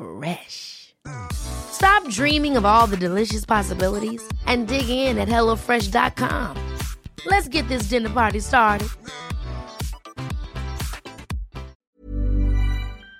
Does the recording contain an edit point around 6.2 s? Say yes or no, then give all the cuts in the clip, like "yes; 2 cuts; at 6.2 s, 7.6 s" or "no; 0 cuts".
no; 1 cut; at 11.8 s